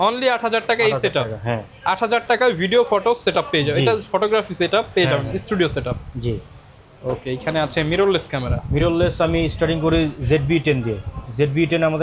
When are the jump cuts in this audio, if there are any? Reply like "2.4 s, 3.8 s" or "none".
none